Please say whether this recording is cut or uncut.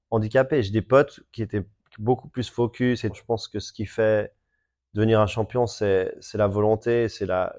cut